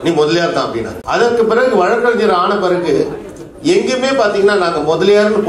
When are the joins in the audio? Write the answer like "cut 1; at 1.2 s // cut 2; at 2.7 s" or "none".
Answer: cut 1; at 1.0 s

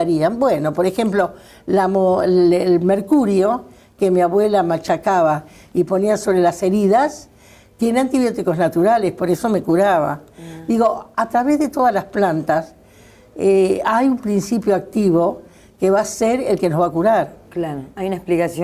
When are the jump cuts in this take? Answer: none

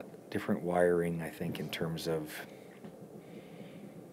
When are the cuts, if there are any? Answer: none

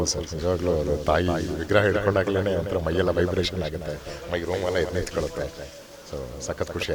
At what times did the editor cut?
none

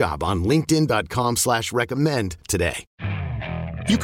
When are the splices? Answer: cut 1; at 2.9 s

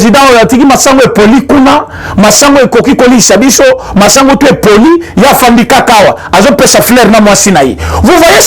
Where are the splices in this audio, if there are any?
none

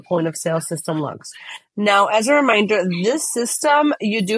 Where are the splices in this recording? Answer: cut 1; at 1.6 s

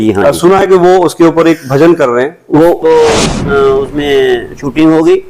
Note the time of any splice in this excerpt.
cut 1; at 2.8 s

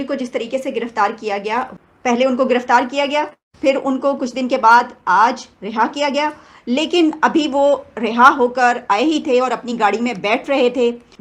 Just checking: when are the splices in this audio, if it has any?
cut 1; at 1.7 s

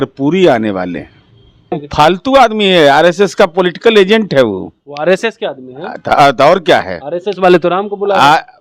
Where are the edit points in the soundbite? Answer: cut 1; at 1.8 s

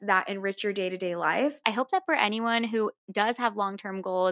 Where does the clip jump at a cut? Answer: cut 1; at 1.6 s

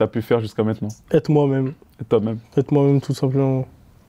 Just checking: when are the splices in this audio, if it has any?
cut 1; at 0.9 s

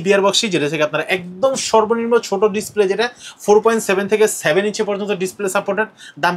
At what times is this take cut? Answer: none

